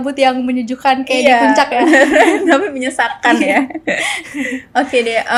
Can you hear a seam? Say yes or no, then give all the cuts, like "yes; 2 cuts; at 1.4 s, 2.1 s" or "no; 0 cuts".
no; 0 cuts